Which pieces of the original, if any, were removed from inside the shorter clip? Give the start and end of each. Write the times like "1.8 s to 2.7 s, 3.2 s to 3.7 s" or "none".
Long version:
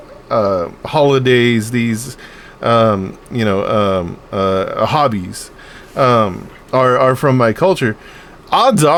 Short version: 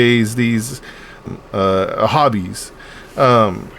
2.6 s to 4.0 s